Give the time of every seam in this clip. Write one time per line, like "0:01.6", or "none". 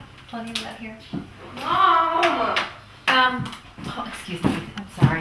0:02.0